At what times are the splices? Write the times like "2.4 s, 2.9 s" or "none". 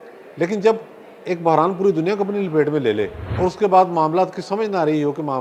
3.2 s